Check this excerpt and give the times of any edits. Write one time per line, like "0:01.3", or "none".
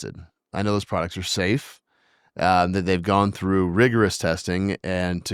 none

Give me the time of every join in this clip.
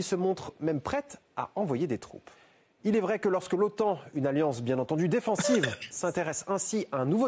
0:03.2

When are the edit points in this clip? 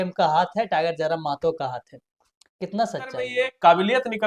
0:03.3

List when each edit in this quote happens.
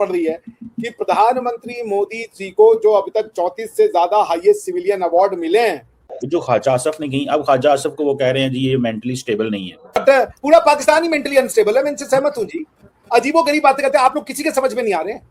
0:06.1
0:10.0

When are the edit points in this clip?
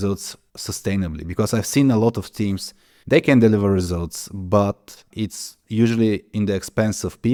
none

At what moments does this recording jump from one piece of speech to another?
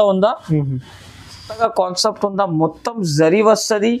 0:01.5

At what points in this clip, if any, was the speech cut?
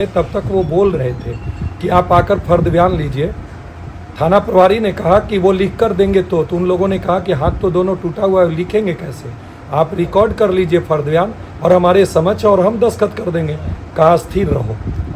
none

